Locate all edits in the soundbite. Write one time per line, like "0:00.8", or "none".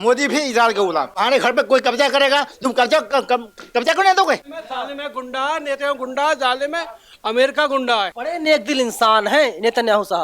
0:01.1
0:04.5
0:08.1